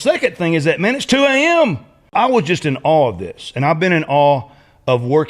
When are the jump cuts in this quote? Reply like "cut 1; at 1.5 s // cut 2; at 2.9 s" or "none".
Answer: cut 1; at 2.1 s